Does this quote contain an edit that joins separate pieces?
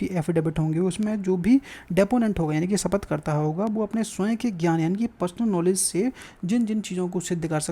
no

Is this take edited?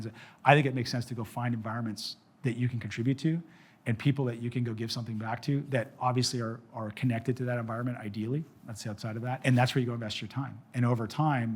yes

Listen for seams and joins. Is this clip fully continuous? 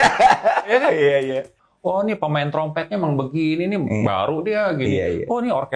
no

